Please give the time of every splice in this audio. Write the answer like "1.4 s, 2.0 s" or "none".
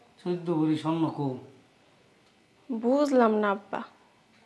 none